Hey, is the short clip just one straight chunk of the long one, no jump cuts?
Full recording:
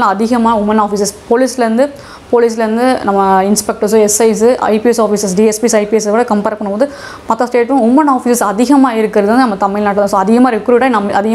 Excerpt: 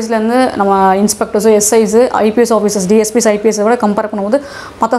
yes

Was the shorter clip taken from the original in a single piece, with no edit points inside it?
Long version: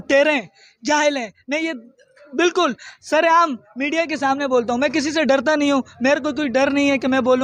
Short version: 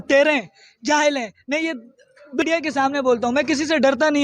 no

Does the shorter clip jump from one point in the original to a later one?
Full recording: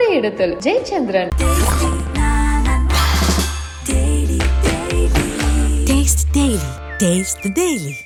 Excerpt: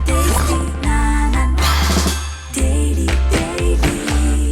no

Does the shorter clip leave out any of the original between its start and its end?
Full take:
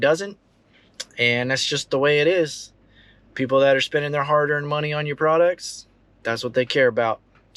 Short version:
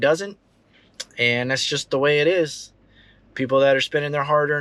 no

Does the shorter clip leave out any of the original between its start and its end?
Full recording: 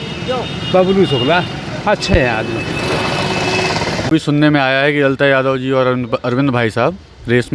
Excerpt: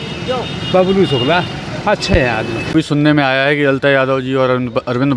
yes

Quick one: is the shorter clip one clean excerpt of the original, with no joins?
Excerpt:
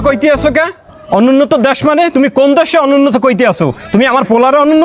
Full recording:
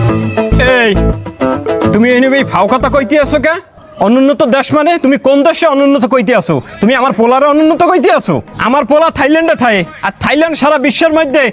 yes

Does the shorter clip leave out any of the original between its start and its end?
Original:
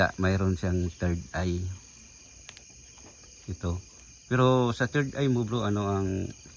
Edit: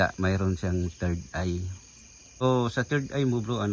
yes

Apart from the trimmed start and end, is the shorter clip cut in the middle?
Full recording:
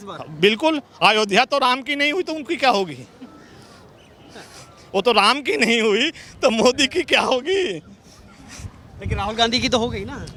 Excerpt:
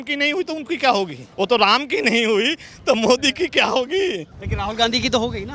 yes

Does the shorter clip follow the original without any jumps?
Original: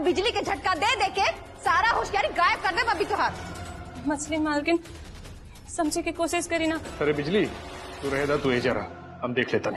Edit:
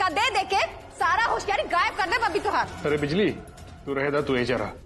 no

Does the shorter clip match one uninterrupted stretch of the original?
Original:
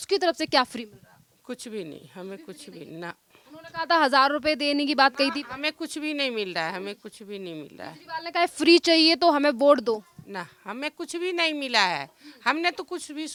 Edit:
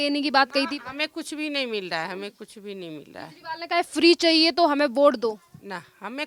yes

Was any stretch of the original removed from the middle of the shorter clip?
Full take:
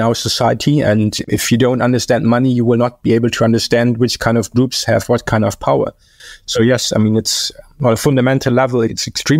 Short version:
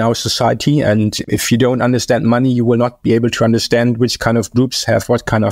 no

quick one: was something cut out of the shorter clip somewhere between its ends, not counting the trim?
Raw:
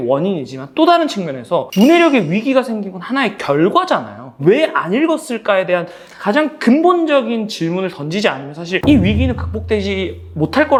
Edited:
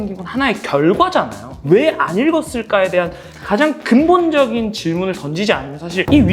no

